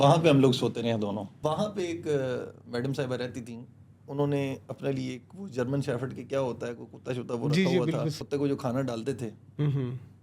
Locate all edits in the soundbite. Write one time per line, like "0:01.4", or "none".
0:01.3
0:08.2